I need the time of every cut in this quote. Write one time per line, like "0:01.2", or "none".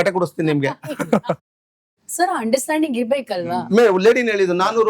0:01.4
0:03.7